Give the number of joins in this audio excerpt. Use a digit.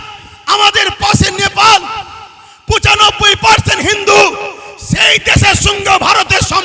0